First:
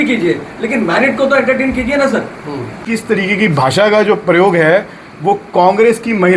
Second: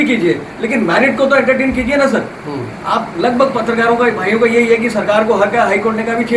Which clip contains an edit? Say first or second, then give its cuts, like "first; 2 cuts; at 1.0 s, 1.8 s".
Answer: first; 1 cut; at 2.8 s